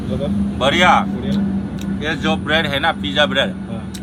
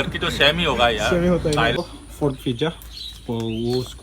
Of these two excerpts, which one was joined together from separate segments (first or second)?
second